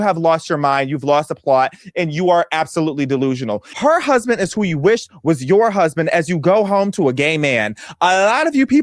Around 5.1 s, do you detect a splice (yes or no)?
no